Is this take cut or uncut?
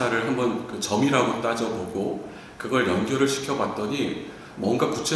uncut